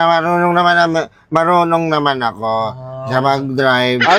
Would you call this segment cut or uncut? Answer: uncut